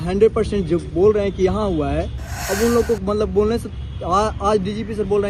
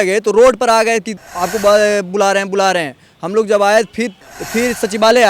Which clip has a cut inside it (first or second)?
second